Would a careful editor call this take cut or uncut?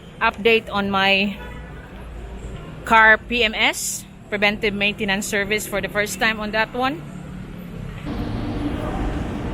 cut